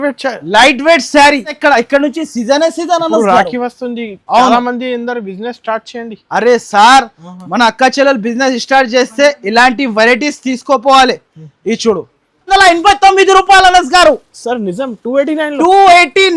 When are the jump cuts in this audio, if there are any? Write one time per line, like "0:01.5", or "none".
0:01.6
0:12.5